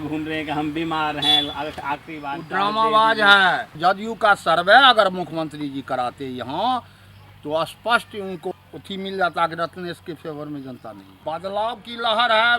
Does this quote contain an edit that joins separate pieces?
yes; 3 cuts; at 3.7 s, 8.5 s, 11.1 s

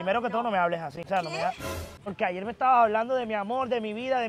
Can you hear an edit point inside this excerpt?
yes; 1 cut; at 2.0 s

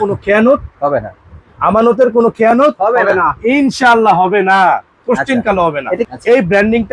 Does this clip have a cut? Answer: no; 0 cuts

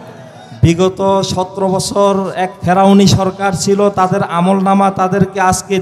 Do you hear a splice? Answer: no; 0 cuts

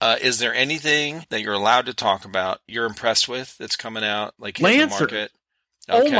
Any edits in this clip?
yes; 2 cuts; at 1.2 s, 2.7 s

